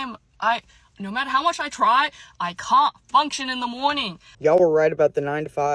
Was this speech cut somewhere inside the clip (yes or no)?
yes